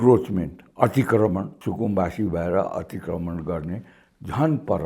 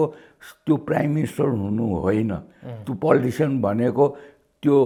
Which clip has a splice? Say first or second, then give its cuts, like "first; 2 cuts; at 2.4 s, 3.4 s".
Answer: first; 1 cut; at 1.5 s